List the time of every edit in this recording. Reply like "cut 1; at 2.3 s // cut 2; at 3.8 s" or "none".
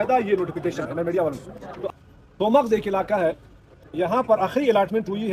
cut 1; at 1.7 s